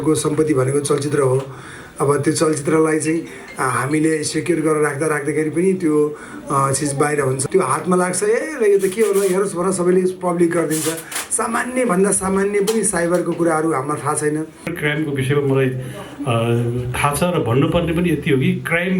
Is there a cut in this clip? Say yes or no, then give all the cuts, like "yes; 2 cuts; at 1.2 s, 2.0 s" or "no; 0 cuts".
yes; 2 cuts; at 7.4 s, 14.8 s